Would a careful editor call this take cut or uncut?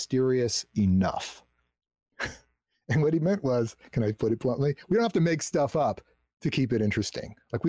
uncut